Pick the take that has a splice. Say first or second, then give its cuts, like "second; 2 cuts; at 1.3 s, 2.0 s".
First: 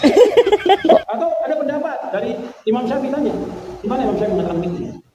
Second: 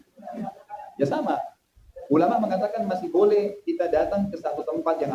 first; 1 cut; at 1.0 s